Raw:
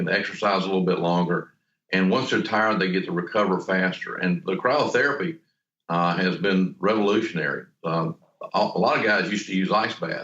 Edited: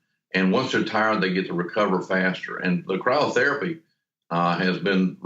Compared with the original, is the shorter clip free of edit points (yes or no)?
yes